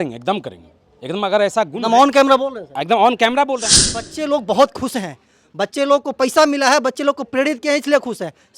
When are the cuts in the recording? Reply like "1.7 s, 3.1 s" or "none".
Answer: 4.1 s

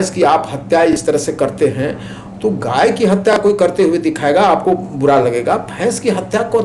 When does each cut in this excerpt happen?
none

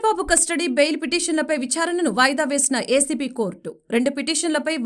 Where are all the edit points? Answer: none

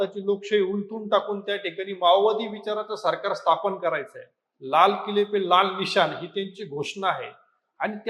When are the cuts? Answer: none

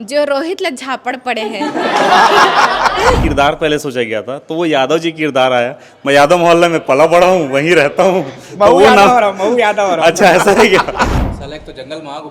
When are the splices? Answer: 3.2 s, 11.1 s

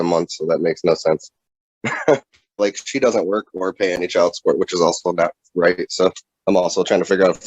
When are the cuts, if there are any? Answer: 2.6 s, 6.3 s

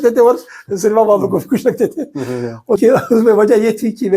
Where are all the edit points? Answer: 2.3 s

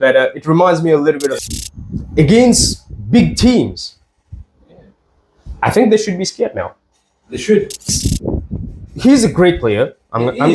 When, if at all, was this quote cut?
1.4 s, 8.0 s

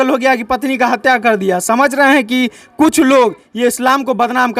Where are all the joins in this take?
none

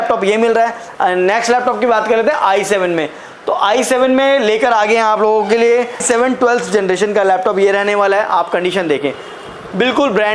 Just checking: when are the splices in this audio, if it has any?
6.0 s

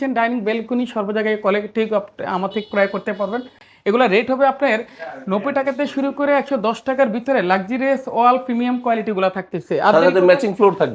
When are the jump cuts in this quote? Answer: none

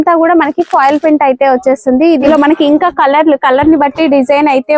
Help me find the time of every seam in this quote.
2.3 s

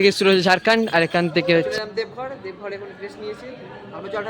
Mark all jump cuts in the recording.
1.7 s

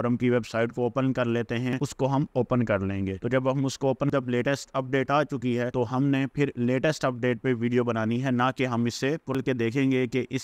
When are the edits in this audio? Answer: 1.7 s, 4.1 s, 9.3 s

